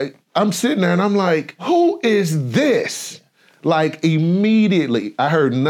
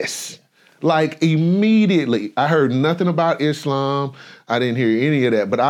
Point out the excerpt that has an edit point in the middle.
first; 1 cut; at 1.6 s

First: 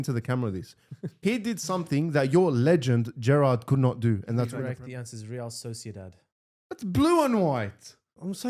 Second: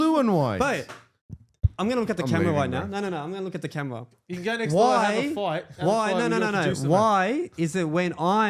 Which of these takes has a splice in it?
first; 1 cut; at 4.5 s

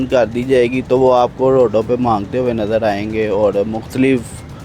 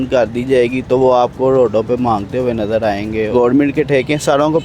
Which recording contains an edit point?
second; 1 cut; at 3.3 s

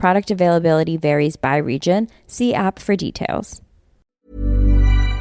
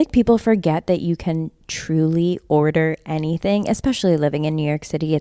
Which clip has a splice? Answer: first; 1 cut; at 4.1 s

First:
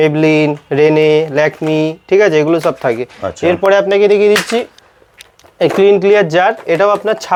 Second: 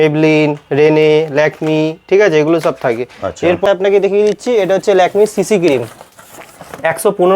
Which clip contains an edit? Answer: second; 1 cut; at 3.6 s

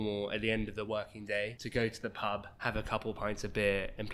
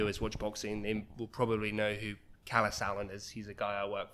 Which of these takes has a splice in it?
first; 2 cuts; at 1.6 s, 2.5 s

